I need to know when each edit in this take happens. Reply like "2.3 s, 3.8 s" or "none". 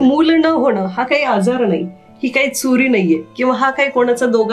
none